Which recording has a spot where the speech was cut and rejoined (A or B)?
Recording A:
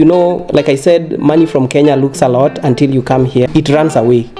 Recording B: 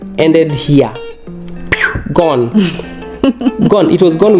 A